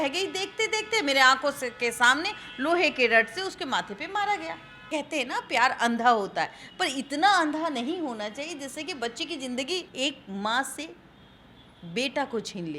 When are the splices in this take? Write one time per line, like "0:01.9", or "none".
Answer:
0:04.9
0:09.9